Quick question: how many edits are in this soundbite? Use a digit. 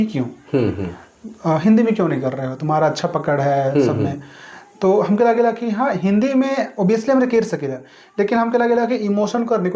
0